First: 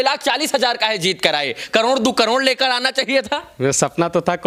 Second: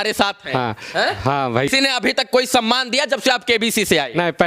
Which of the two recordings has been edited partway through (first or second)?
second